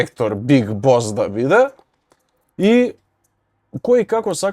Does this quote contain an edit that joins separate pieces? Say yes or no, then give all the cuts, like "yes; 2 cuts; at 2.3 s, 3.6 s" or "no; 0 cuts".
no; 0 cuts